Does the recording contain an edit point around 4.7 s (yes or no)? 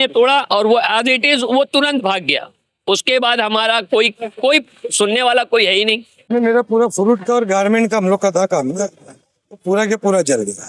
no